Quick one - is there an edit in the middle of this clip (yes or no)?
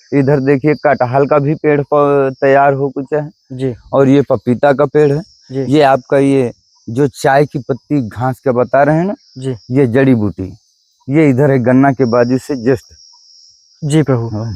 no